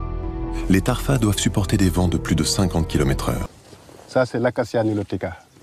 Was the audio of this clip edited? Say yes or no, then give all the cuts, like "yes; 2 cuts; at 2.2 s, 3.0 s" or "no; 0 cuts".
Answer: yes; 1 cut; at 3.5 s